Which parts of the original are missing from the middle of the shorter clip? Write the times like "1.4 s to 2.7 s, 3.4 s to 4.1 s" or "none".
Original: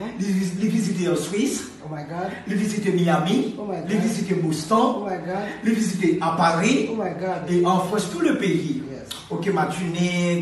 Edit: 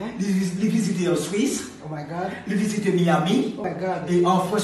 3.6 s to 7.0 s